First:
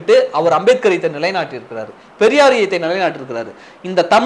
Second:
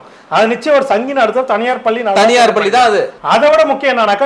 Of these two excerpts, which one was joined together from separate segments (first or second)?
second